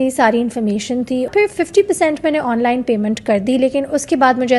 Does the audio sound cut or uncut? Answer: cut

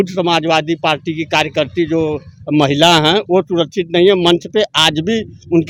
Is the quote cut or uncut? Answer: uncut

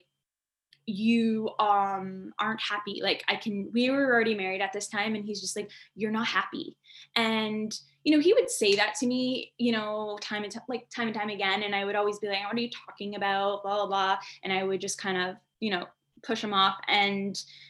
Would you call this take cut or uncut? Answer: uncut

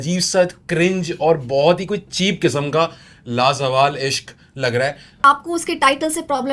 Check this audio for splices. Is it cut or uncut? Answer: cut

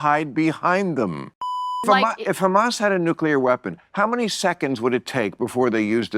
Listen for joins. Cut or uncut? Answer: cut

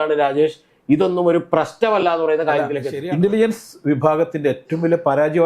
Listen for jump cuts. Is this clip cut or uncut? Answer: cut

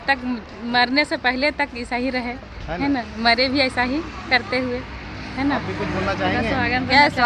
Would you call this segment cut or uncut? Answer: uncut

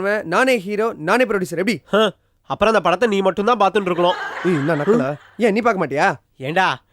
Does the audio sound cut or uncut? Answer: uncut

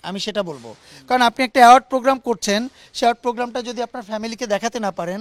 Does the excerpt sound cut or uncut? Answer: uncut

